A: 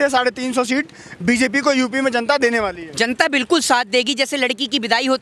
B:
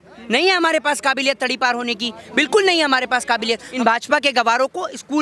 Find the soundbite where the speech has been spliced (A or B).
B